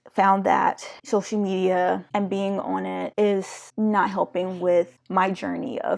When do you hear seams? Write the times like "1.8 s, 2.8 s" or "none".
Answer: 0.9 s, 2.0 s, 3.2 s, 5.0 s